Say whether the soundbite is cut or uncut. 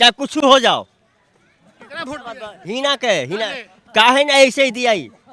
uncut